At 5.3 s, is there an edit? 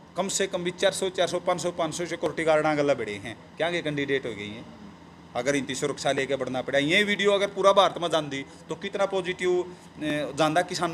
no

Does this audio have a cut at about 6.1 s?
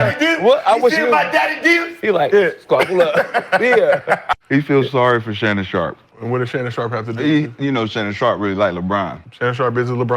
yes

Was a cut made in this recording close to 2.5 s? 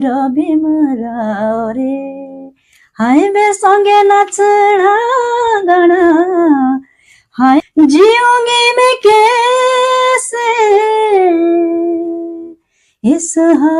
no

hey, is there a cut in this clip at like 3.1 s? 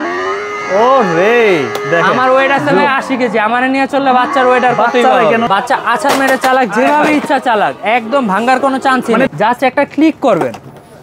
no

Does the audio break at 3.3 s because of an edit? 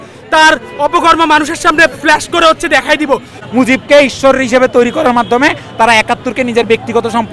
yes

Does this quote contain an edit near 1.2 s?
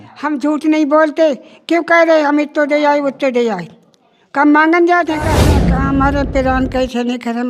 no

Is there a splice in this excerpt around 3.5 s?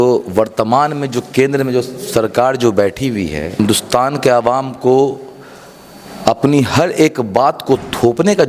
yes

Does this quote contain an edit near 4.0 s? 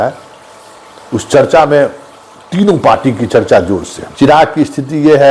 yes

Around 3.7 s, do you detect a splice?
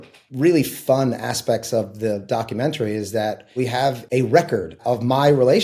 yes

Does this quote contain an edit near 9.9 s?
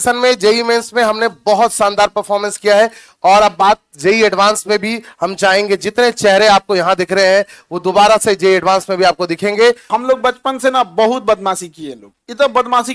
yes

